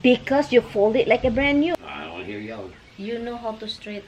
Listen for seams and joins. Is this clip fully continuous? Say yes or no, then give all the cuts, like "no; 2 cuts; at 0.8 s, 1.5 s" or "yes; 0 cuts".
no; 1 cut; at 1.7 s